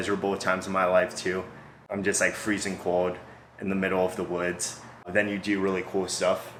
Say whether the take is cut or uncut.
uncut